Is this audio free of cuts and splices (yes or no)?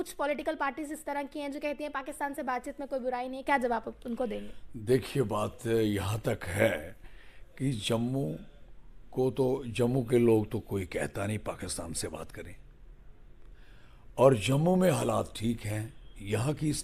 yes